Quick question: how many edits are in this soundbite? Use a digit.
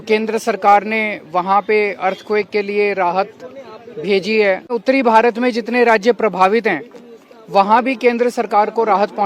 1